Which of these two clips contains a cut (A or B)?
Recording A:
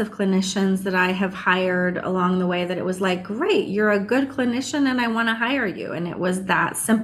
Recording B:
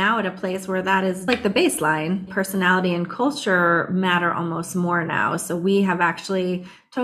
B